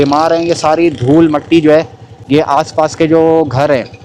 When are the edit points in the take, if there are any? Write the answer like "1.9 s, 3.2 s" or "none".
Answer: none